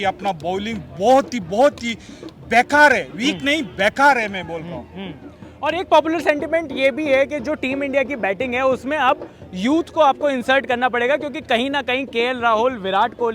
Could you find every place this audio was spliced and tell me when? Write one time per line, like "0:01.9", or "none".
none